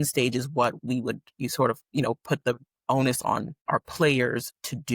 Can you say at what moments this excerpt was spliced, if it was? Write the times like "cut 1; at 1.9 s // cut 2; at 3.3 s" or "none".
cut 1; at 3.5 s